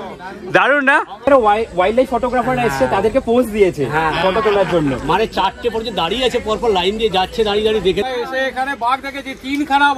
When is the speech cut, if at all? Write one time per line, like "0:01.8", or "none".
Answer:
0:01.3
0:08.0